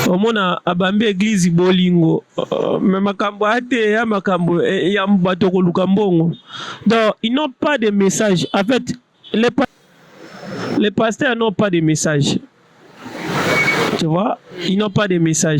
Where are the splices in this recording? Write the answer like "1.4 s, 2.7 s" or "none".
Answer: 9.6 s

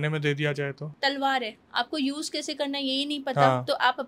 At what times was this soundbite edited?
0.9 s

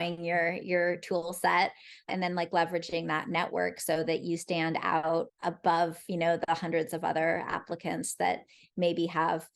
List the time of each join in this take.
2.1 s, 5.3 s

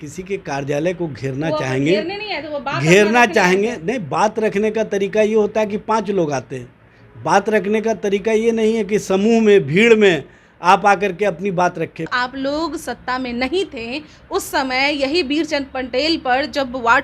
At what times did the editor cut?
12.1 s

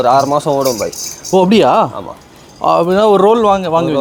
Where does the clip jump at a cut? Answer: none

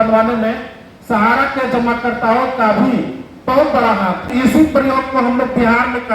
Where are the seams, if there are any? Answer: 4.3 s

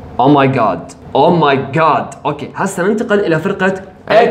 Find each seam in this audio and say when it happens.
0.9 s

